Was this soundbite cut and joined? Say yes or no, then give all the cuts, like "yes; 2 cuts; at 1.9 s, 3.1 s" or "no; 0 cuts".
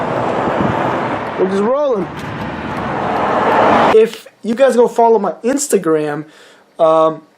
yes; 1 cut; at 3.9 s